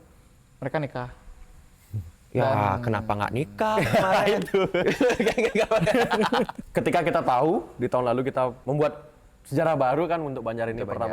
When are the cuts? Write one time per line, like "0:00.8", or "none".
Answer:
0:06.6
0:08.6